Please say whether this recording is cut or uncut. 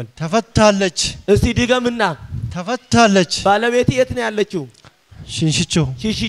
uncut